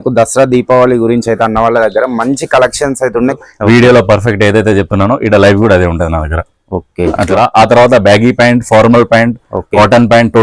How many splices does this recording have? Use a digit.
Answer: 2